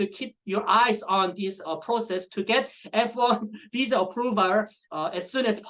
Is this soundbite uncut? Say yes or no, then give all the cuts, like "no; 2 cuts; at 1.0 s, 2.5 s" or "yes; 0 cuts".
yes; 0 cuts